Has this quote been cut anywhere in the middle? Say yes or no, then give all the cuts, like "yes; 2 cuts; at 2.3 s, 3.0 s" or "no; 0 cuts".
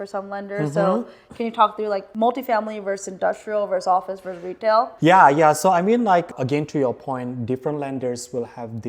yes; 3 cuts; at 2.1 s, 4.9 s, 6.3 s